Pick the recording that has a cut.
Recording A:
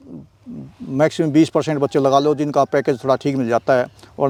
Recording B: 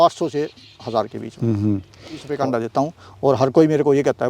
B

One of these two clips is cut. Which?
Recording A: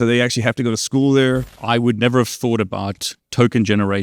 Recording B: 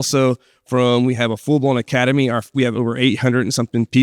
A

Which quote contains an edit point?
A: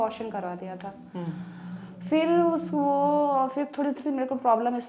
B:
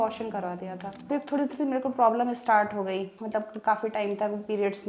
B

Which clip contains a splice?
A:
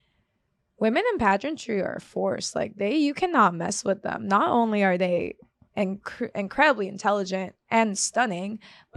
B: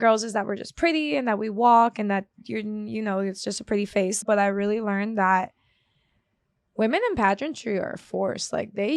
B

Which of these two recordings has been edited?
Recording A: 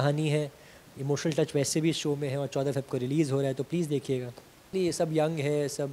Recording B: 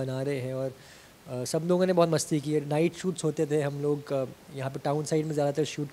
A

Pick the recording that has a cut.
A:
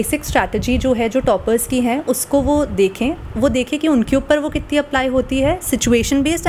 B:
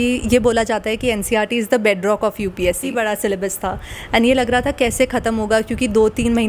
B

